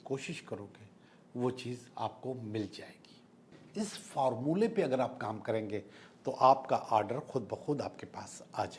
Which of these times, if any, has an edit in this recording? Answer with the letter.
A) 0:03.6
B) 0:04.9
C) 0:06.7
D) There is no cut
A